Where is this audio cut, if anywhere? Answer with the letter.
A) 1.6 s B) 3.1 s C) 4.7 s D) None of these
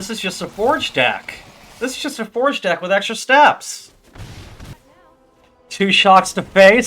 C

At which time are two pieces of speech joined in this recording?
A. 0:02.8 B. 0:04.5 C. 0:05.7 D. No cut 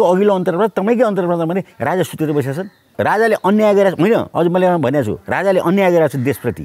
A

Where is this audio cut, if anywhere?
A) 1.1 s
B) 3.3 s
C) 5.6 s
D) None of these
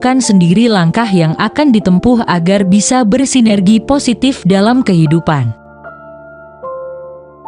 C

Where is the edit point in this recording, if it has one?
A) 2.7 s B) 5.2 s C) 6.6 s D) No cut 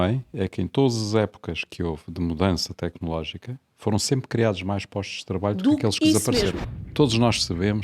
C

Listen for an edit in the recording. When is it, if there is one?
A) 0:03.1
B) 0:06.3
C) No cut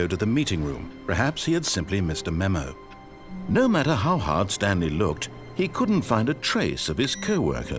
A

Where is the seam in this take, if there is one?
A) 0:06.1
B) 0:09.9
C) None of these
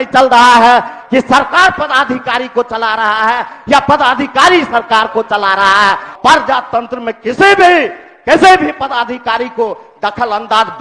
A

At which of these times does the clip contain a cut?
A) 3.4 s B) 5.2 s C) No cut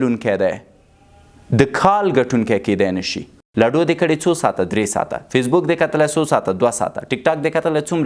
A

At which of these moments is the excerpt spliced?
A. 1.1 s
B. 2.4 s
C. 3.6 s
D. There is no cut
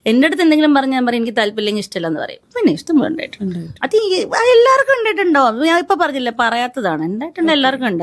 B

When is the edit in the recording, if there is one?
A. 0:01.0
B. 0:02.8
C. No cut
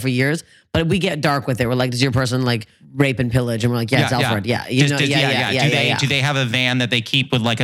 B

